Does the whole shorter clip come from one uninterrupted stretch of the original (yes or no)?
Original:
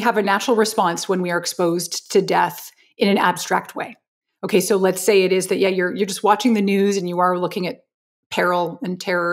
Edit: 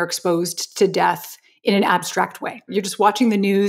no